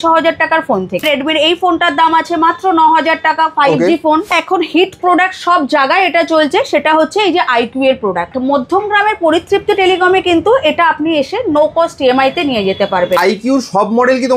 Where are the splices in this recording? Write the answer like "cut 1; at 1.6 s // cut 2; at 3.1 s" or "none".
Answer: cut 1; at 1.0 s // cut 2; at 4.3 s // cut 3; at 8.3 s // cut 4; at 13.2 s